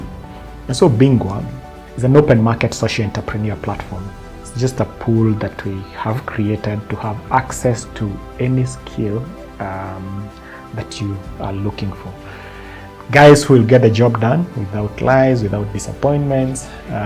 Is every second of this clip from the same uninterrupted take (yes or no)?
yes